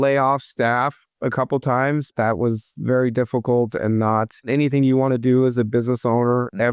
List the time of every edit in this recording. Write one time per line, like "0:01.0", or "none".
0:02.1